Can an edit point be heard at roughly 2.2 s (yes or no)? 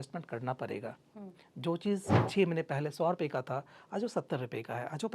yes